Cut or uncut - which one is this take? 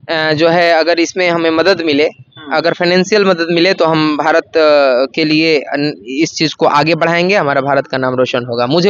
uncut